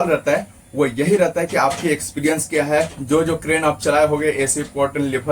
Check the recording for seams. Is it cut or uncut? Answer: cut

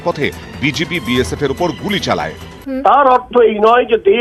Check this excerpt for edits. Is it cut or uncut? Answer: cut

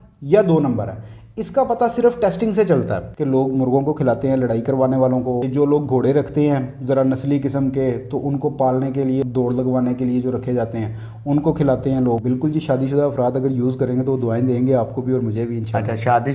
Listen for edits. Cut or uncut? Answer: cut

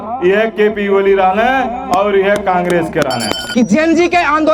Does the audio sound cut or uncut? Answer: cut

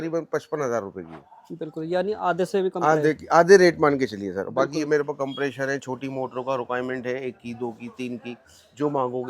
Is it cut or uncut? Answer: uncut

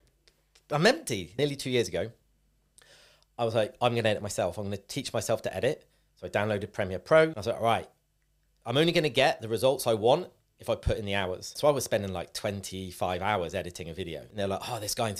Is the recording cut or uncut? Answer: cut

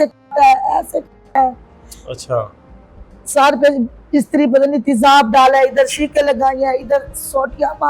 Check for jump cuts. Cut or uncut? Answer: uncut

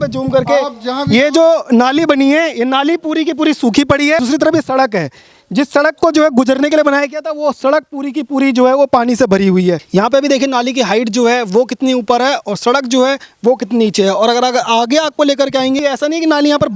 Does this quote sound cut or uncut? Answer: cut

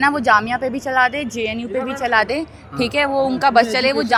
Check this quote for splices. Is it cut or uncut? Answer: uncut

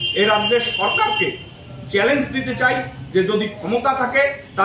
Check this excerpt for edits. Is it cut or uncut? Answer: uncut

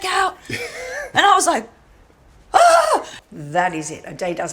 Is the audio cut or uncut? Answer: cut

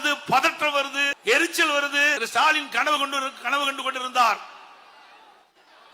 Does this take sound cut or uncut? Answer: cut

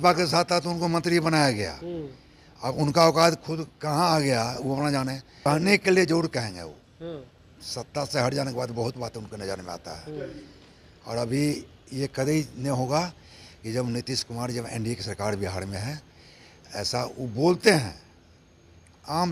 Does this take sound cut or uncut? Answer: cut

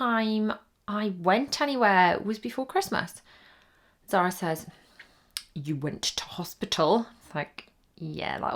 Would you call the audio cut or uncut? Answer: uncut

